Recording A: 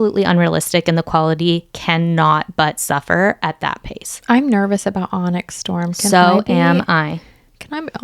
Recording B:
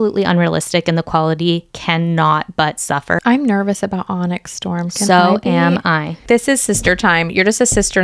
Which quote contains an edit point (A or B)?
B